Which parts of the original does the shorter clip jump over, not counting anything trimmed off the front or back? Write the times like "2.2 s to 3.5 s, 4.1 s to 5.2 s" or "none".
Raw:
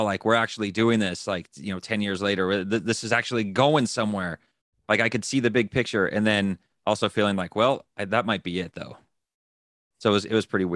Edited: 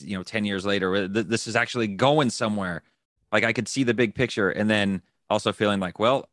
none

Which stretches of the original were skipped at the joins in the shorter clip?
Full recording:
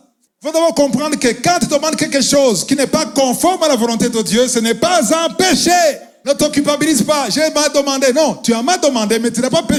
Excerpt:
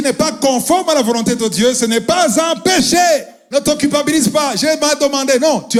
none

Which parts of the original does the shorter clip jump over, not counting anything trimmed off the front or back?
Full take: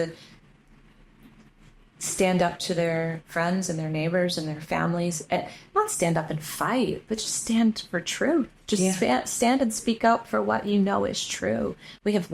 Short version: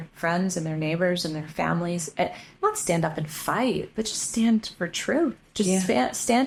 none

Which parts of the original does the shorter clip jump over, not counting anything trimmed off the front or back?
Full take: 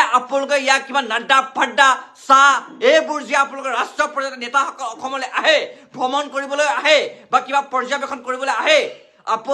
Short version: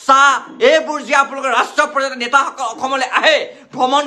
none

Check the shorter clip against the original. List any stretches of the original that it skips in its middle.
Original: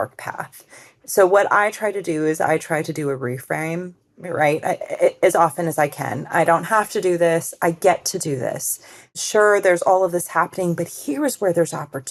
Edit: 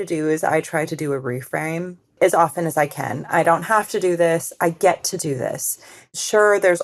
4.1 s to 5.2 s

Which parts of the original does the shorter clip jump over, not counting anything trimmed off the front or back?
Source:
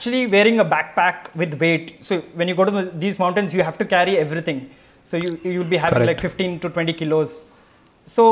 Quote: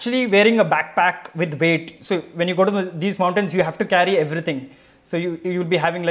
none

